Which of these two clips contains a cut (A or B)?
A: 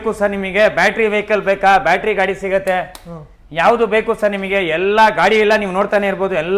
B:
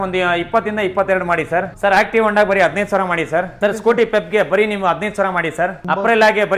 B